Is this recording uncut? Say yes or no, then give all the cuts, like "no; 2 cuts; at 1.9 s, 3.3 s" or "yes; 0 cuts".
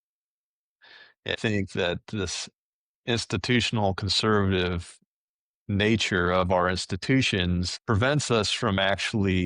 no; 2 cuts; at 1.3 s, 7.7 s